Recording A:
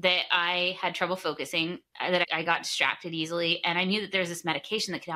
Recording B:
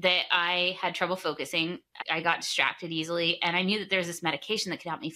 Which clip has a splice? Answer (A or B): B